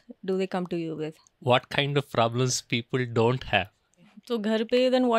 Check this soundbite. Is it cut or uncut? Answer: cut